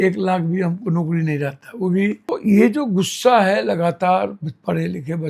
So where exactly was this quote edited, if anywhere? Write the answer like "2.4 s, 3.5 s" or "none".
2.3 s